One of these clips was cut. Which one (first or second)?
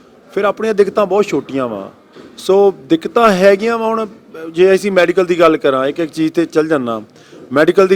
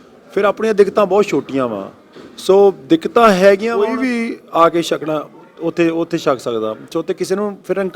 second